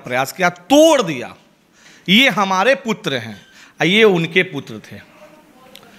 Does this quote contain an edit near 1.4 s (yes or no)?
no